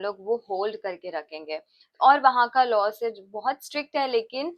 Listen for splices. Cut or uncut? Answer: uncut